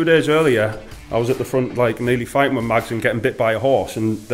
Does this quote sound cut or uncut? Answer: uncut